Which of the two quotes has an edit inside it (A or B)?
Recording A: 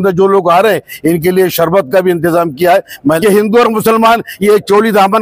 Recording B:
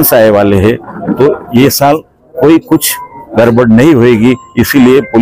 A